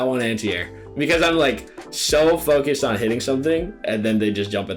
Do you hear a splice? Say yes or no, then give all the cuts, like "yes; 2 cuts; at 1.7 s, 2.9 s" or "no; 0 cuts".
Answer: no; 0 cuts